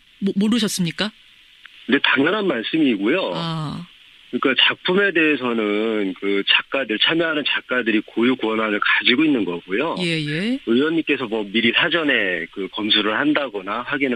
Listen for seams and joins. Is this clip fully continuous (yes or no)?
yes